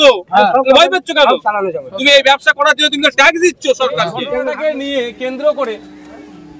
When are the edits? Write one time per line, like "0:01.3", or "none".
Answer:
0:04.2